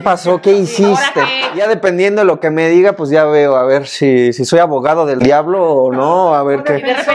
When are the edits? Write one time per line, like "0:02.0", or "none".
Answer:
0:01.6